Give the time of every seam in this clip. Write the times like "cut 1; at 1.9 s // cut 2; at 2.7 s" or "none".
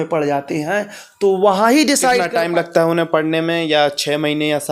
cut 1; at 2.3 s